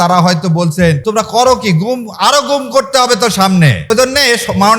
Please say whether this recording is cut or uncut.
cut